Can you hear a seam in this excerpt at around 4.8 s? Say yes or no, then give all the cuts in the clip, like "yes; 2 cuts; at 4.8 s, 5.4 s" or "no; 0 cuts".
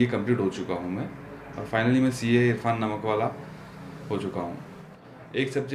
yes; 1 cut; at 4.8 s